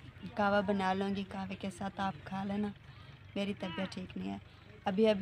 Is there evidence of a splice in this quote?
no; 0 cuts

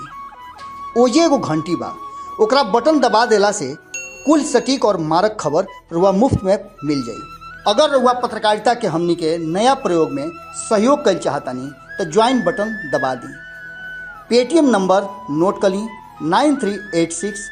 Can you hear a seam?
no; 0 cuts

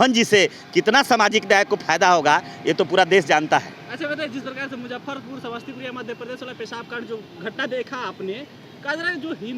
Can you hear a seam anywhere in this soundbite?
no; 0 cuts

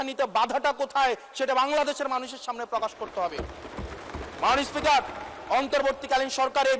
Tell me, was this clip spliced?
no; 0 cuts

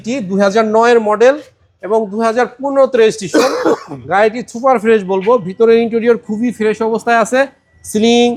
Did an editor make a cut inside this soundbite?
no; 0 cuts

